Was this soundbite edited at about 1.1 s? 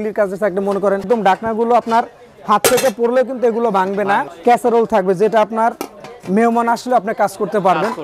yes; 2 cuts; at 1.1 s, 4.3 s

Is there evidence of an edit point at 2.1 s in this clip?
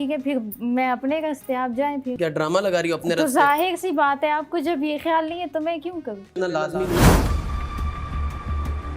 yes; 2 cuts; at 2.1 s, 6.3 s

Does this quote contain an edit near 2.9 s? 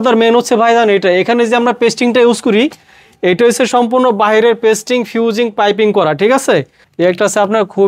no; 1 cut; at 6.8 s

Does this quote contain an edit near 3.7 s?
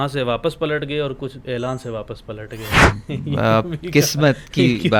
no; 0 cuts

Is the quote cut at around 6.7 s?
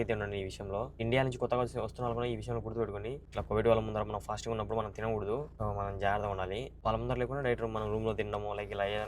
yes; 4 cuts; at 1.0 s, 3.2 s, 5.5 s, 6.7 s

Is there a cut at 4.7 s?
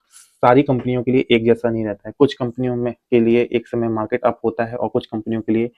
no; 0 cuts

